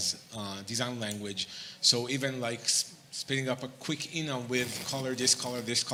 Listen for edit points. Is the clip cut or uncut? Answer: uncut